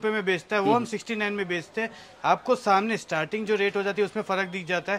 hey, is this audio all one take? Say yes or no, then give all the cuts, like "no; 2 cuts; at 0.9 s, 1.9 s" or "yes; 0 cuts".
yes; 0 cuts